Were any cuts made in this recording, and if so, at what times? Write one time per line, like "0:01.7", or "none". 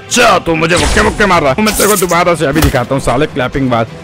0:01.6